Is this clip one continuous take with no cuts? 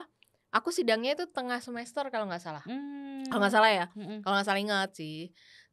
yes; 0 cuts

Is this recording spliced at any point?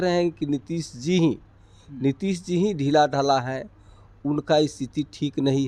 no; 0 cuts

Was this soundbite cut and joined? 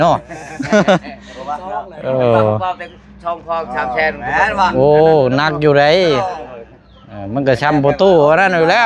no; 0 cuts

